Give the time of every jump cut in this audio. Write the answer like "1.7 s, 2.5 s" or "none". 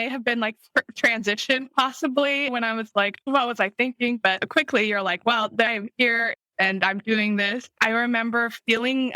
7.7 s